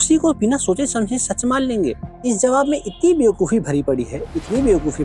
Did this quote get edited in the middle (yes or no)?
yes